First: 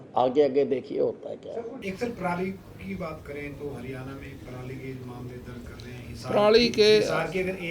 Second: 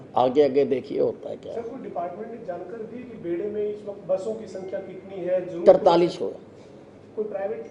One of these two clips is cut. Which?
first; 1 cut; at 1.8 s

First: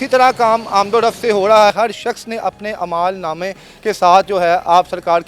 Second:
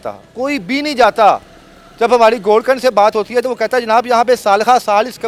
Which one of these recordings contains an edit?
first; 1 cut; at 1.7 s

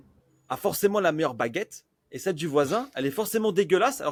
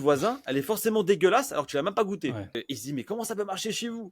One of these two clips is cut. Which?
second; 1 cut; at 2.6 s

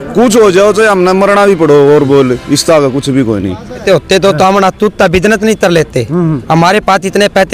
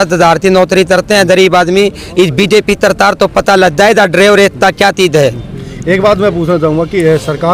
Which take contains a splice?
first; 1 cut; at 3.8 s

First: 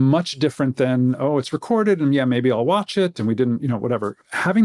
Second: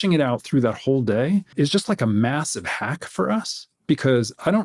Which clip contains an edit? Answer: second; 1 cut; at 1.5 s

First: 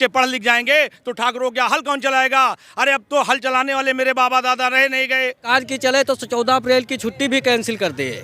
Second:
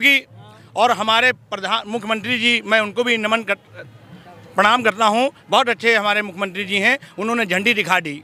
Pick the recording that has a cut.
first; 1 cut; at 5.4 s

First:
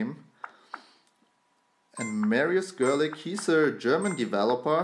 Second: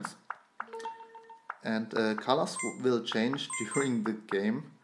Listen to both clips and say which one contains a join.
first; 1 cut; at 3.3 s

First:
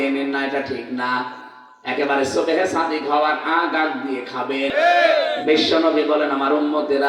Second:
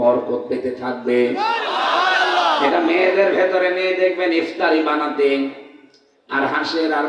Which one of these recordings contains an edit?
first; 1 cut; at 4.7 s

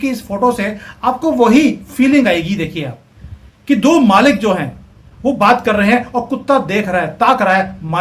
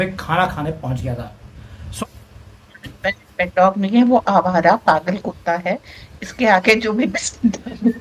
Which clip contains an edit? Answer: second; 1 cut; at 2.0 s

